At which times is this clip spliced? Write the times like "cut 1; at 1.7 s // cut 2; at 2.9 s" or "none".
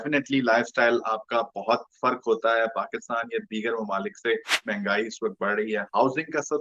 cut 1; at 4.7 s